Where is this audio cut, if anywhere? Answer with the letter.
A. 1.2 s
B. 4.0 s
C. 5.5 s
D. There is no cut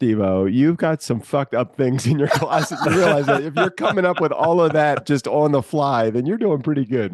D